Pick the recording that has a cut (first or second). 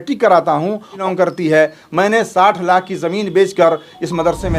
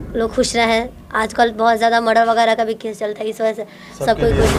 first